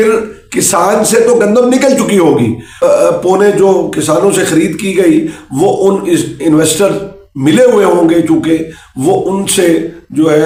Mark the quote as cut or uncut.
uncut